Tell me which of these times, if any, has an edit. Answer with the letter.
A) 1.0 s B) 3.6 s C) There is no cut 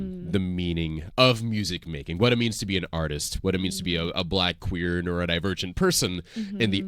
A